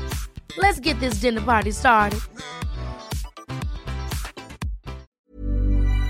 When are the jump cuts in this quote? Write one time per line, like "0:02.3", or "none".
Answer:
0:05.1